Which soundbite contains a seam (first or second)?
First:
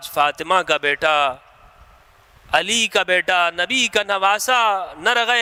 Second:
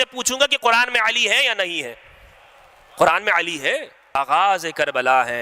second